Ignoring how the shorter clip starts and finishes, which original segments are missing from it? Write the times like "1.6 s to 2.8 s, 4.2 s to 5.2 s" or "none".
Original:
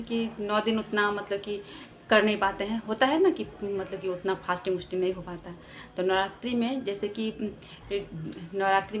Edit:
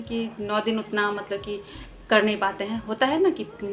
none